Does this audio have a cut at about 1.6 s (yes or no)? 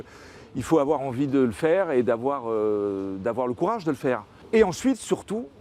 no